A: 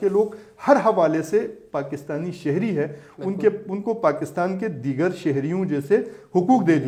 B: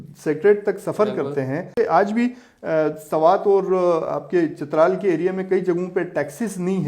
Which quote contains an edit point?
B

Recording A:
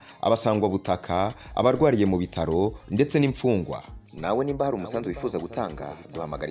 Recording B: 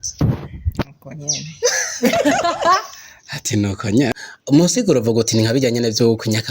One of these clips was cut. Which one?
B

